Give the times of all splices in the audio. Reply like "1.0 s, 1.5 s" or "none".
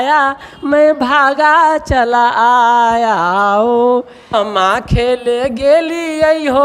4.3 s